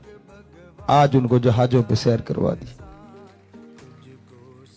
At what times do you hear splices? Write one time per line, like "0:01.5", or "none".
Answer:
0:02.7